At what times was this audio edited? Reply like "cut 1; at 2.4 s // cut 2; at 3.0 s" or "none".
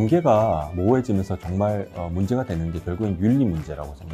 none